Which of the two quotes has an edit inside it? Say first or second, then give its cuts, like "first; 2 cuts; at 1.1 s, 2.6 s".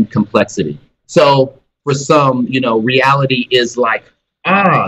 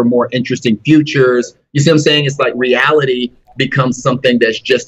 first; 2 cuts; at 1.0 s, 1.7 s